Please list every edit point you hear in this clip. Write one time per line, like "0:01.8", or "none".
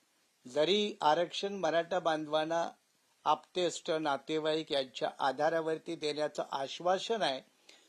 none

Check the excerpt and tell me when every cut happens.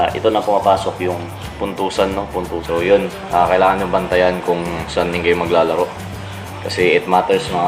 0:02.6

